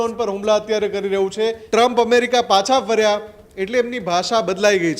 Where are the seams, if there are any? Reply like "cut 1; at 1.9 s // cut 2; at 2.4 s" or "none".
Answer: cut 1; at 1.6 s